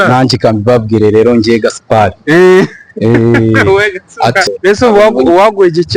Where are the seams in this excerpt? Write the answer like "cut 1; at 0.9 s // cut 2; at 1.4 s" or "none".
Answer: cut 1; at 4.4 s